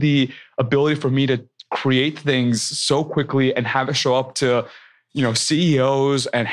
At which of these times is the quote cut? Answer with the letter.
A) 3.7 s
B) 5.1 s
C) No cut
A